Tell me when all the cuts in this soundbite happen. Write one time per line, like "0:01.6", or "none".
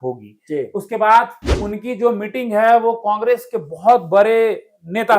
0:01.4